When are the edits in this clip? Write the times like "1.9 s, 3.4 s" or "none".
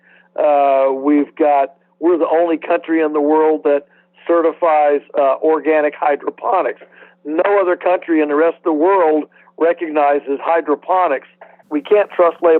11.7 s

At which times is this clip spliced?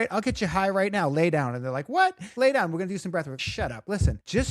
2.3 s, 3.6 s

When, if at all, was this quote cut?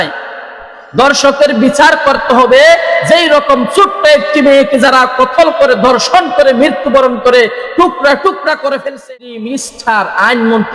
9.0 s

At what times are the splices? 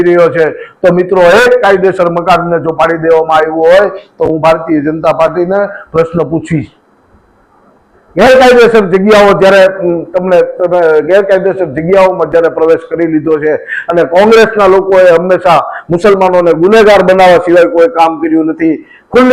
none

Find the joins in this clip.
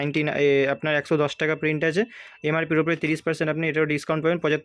none

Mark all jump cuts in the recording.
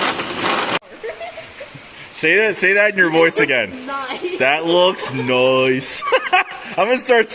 0.9 s

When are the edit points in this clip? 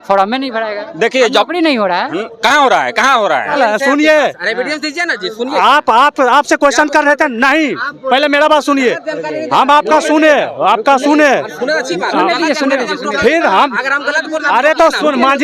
3.6 s

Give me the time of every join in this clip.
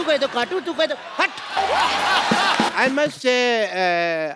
2.7 s

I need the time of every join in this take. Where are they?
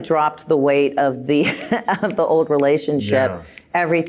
none

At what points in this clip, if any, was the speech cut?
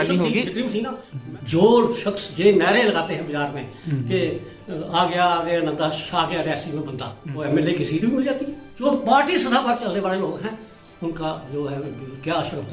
1.2 s, 7.4 s, 8.9 s

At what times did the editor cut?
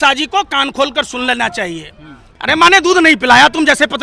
2.2 s

